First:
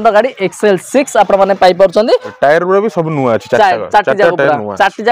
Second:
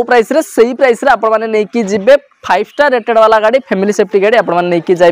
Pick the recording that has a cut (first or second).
first